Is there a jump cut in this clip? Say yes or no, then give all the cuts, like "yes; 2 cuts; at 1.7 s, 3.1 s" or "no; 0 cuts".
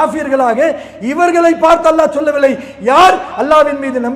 no; 0 cuts